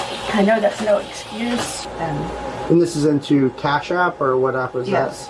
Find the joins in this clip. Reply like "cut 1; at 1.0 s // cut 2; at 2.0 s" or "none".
cut 1; at 1.8 s